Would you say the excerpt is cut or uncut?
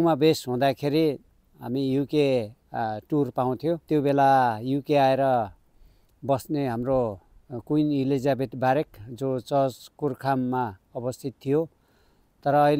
cut